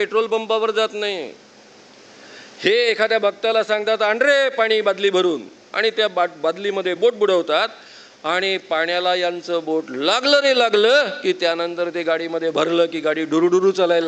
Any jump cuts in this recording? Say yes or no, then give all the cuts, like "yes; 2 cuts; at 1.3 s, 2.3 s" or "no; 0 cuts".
no; 0 cuts